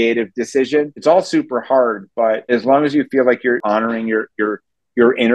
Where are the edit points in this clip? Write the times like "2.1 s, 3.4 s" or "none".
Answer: 0.9 s, 2.5 s, 3.6 s